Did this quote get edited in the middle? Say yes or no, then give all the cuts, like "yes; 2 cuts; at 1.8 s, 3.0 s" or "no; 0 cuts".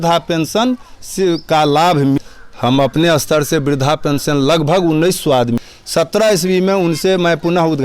yes; 2 cuts; at 2.2 s, 5.7 s